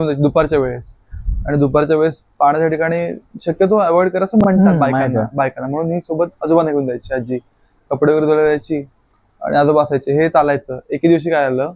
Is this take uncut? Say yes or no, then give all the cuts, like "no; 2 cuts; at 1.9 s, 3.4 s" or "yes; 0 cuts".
yes; 0 cuts